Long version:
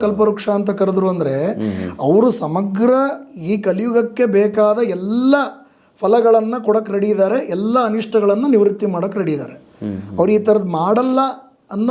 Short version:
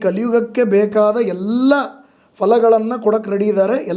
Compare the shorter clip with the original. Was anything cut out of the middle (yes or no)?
no